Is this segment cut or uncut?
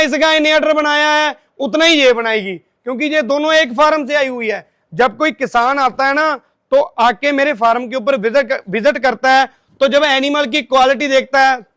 uncut